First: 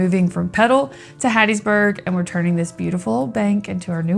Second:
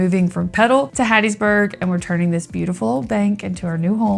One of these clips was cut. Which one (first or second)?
second